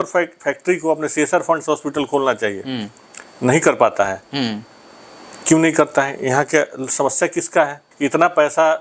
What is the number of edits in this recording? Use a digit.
1